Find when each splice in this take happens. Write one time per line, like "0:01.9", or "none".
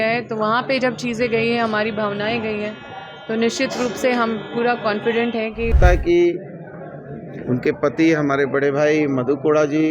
0:05.7